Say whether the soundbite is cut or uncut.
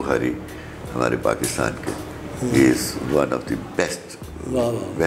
uncut